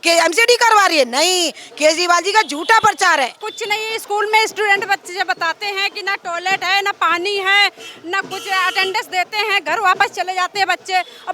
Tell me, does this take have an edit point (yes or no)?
yes